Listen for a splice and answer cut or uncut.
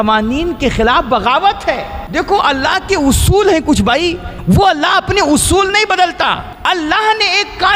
cut